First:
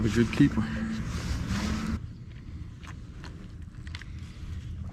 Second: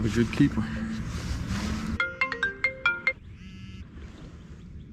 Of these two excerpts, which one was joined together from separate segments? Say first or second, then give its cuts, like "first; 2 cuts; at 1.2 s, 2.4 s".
second; 2 cuts; at 2.0 s, 3.5 s